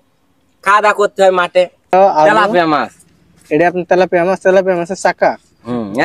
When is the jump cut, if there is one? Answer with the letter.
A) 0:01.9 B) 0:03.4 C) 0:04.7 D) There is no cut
A